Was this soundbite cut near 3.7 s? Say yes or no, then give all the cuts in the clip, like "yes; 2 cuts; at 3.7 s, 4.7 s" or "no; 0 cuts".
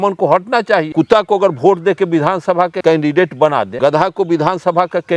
yes; 3 cuts; at 0.9 s, 2.8 s, 3.7 s